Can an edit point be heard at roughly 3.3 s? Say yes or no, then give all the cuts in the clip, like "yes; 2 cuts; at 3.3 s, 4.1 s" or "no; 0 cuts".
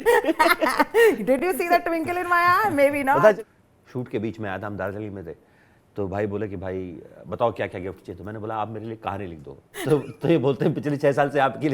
yes; 1 cut; at 3.3 s